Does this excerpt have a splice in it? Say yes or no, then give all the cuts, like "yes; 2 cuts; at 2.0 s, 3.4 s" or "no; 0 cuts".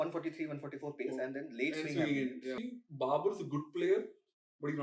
yes; 1 cut; at 2.6 s